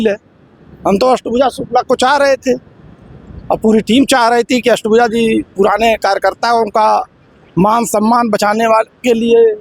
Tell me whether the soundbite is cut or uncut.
uncut